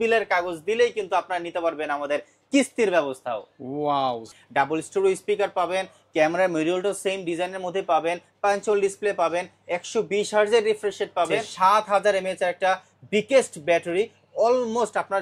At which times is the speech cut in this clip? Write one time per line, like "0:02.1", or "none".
0:04.3
0:11.4